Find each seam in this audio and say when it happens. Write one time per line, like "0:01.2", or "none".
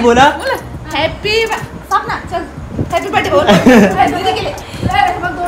none